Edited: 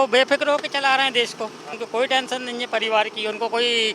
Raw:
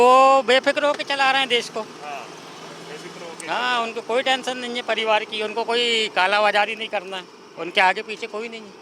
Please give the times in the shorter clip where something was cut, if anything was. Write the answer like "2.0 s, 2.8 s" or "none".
1.7 s